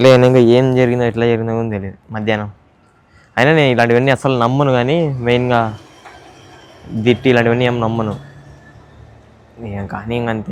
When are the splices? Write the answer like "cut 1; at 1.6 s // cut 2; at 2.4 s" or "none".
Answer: none